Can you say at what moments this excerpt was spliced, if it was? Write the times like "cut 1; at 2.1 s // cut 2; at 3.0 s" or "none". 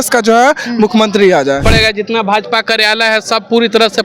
cut 1; at 1.6 s